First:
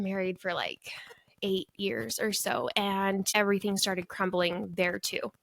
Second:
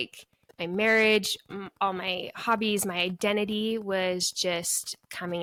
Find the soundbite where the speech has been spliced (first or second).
first